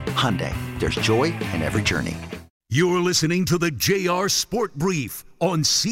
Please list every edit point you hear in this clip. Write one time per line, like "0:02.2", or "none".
0:02.6